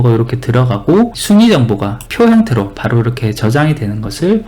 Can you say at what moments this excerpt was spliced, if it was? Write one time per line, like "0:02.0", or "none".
0:01.2
0:02.0